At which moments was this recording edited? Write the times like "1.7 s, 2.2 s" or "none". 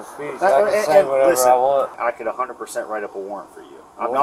2.0 s